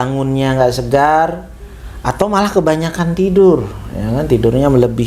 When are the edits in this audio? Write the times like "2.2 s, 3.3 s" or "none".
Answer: none

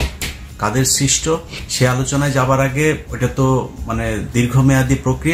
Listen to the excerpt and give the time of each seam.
1.6 s, 3.1 s

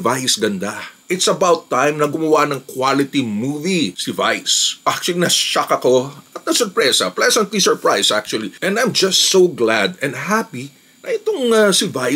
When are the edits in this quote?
1.0 s, 4.7 s, 8.5 s

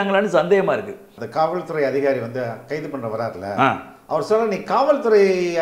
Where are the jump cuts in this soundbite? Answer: 1.2 s

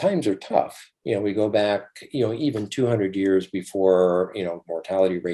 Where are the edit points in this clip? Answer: none

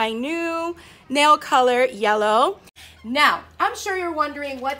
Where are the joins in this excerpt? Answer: 2.8 s

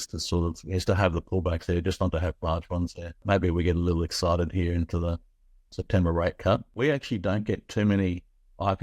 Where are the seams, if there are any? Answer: 3.2 s, 6.7 s

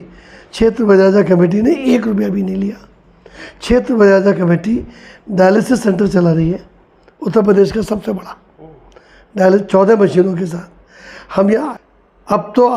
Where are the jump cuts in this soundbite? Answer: 11.7 s

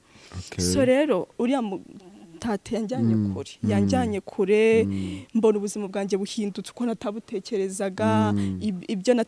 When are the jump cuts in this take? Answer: none

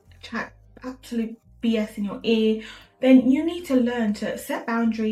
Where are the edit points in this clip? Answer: none

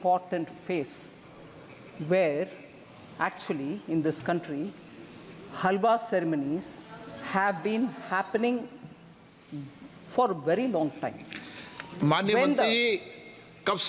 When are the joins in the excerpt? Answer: none

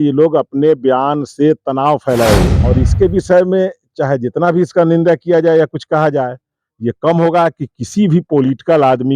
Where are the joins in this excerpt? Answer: 2.5 s

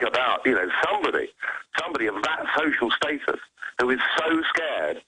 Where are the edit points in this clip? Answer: none

